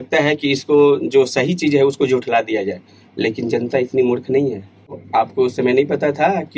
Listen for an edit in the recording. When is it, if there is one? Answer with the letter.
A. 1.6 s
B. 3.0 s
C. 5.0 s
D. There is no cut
C